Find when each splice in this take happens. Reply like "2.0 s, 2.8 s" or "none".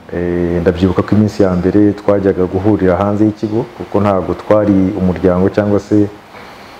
none